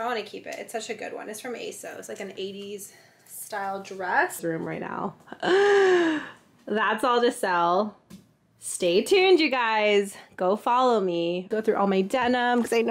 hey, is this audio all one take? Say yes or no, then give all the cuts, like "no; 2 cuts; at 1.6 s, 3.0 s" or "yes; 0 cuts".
no; 2 cuts; at 4.4 s, 11.5 s